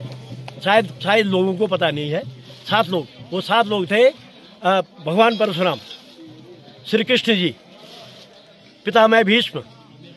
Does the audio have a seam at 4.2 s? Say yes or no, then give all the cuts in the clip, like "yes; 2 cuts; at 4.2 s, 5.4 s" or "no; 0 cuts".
no; 0 cuts